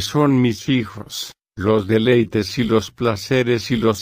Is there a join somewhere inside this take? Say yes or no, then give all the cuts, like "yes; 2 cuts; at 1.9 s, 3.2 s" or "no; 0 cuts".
no; 0 cuts